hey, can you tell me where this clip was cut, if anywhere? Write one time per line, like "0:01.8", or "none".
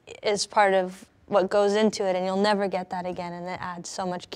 none

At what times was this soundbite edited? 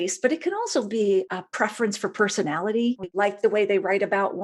0:03.0

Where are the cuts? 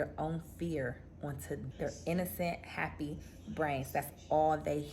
0:01.7

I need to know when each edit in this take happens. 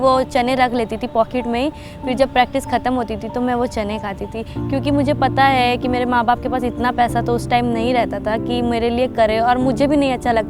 none

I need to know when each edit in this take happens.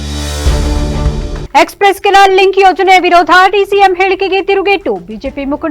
0:01.4

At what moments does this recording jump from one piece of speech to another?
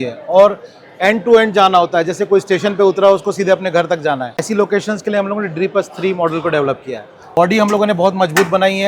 0:04.4
0:07.2

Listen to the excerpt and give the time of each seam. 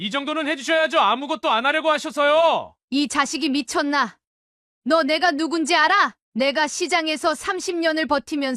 0:02.7
0:06.2

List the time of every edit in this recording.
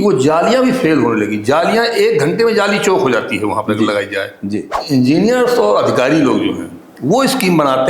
0:04.7

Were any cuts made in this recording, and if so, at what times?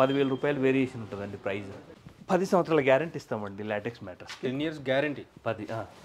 0:01.9

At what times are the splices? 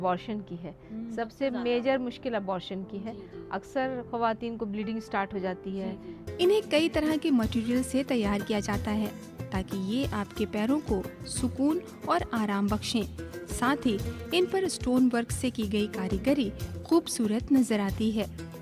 0:06.2

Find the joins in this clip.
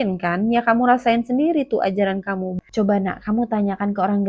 0:02.5

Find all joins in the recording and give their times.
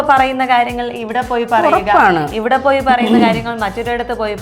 none

